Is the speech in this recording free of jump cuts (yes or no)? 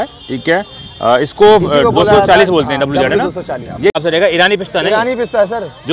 no